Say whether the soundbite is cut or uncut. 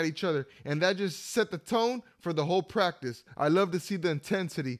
cut